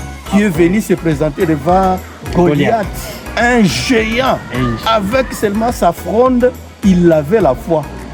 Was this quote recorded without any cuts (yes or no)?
yes